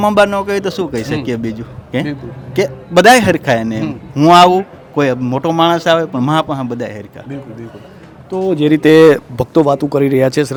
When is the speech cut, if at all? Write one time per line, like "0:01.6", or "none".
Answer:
none